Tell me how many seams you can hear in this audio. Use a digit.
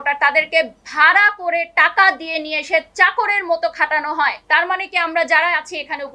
1